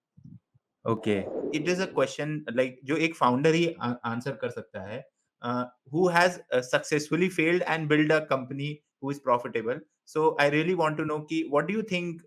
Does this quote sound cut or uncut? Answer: cut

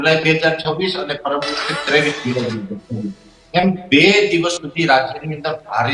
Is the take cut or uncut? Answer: uncut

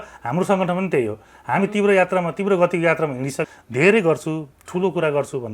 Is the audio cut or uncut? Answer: cut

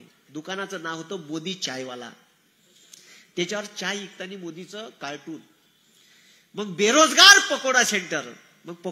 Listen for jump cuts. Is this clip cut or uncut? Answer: uncut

